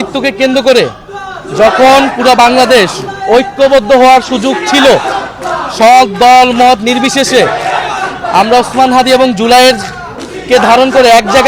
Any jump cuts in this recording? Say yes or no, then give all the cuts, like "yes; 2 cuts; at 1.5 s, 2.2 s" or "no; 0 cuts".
no; 0 cuts